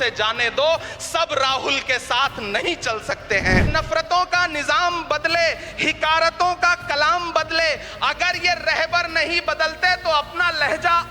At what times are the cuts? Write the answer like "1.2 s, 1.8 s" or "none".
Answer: 3.7 s